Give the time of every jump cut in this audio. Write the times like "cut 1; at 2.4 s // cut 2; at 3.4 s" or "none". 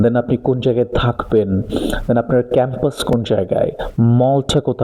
none